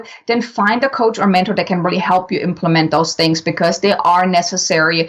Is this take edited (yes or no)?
no